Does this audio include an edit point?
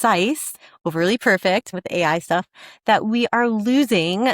yes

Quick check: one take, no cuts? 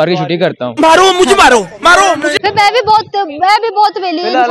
yes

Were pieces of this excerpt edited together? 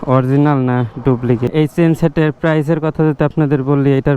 yes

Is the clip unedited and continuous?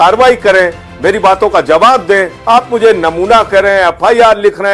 no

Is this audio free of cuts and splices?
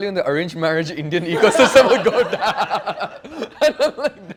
yes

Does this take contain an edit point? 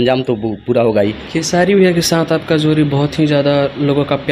yes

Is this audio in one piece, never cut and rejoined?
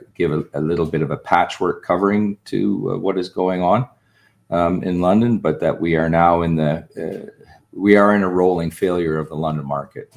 yes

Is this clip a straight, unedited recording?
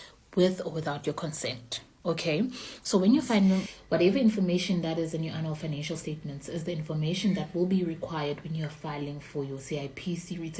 no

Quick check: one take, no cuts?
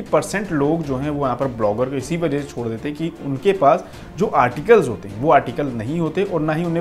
yes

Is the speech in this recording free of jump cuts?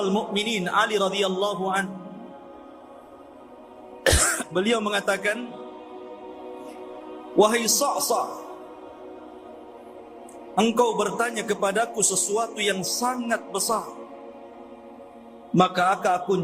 no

